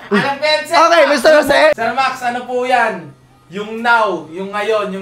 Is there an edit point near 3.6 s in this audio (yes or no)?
no